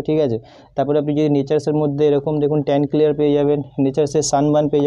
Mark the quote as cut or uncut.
uncut